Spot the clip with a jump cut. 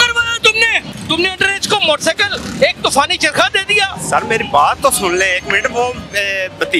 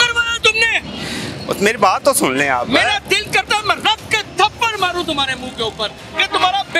first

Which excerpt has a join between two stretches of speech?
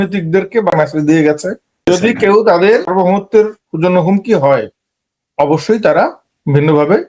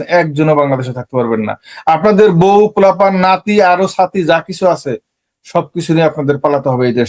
first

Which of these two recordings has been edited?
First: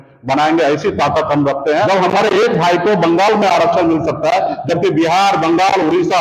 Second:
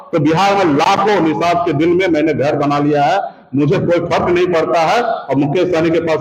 first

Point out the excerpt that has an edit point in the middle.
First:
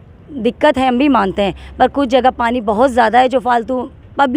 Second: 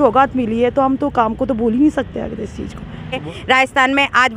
second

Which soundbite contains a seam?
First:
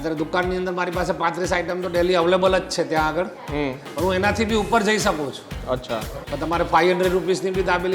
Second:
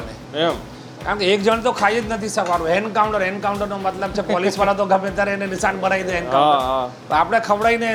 first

